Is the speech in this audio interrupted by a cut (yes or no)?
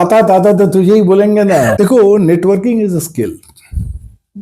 yes